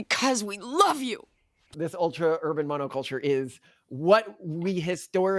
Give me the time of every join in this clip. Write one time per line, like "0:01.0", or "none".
0:01.8